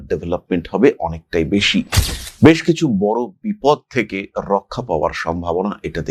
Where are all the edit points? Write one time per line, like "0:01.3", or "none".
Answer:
none